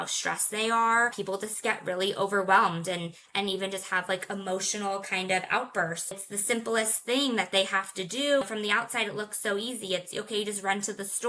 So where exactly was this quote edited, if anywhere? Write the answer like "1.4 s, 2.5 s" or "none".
1.2 s, 6.2 s, 8.4 s